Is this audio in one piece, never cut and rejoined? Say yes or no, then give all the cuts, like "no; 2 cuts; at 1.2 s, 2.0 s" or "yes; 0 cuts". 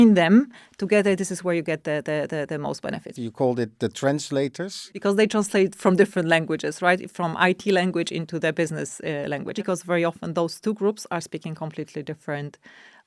no; 3 cuts; at 3.1 s, 4.8 s, 9.6 s